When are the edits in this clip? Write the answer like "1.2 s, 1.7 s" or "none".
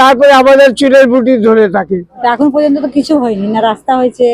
2.1 s